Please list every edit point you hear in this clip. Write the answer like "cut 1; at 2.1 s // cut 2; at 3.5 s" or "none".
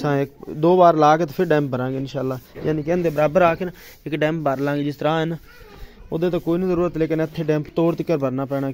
none